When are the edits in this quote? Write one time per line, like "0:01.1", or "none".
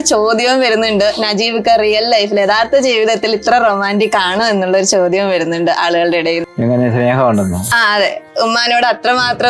0:06.5